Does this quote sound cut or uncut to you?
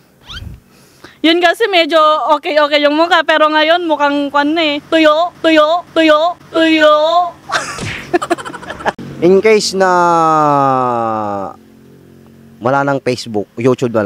cut